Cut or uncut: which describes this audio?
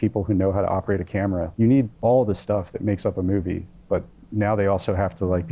cut